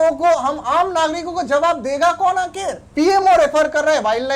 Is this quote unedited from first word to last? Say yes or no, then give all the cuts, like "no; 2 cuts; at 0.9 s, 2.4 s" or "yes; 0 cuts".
no; 1 cut; at 2.8 s